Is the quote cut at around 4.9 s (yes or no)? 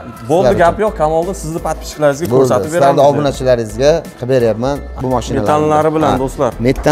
yes